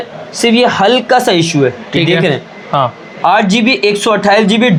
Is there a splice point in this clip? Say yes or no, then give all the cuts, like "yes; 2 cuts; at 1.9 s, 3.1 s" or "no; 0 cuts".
no; 0 cuts